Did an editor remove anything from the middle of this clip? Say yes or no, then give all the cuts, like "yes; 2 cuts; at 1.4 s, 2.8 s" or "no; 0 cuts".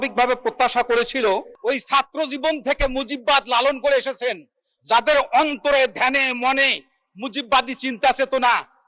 yes; 1 cut; at 1.5 s